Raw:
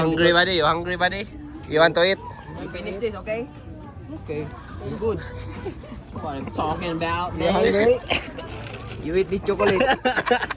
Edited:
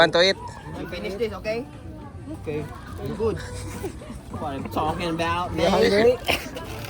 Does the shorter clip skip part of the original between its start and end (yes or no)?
no